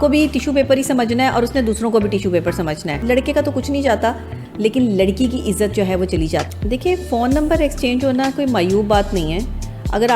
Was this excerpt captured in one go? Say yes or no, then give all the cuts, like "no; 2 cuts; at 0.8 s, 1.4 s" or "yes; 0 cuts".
no; 2 cuts; at 3.0 s, 6.5 s